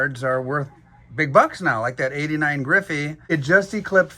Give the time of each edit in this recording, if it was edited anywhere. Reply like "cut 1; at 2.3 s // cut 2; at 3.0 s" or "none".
cut 1; at 3.2 s